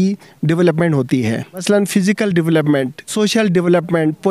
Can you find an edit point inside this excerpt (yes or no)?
yes